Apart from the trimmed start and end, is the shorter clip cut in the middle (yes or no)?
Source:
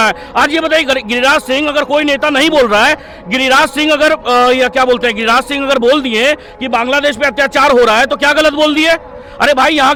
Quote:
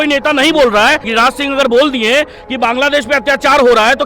yes